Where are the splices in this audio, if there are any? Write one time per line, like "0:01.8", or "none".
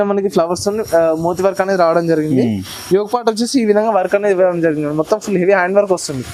none